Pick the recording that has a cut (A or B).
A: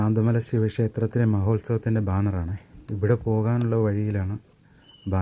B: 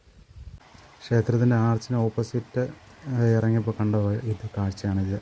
B